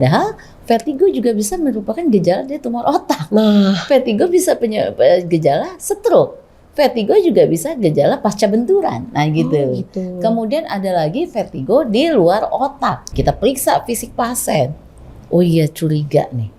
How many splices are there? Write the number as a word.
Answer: one